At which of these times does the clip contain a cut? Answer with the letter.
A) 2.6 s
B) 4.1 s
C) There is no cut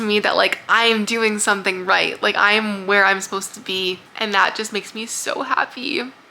B